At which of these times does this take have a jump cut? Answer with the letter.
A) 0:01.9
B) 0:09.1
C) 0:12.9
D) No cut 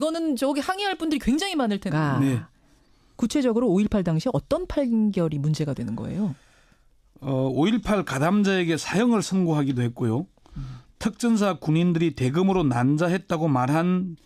D